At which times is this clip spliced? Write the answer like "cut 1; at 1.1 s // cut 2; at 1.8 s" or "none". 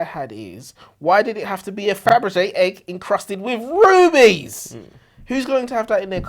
cut 1; at 2.0 s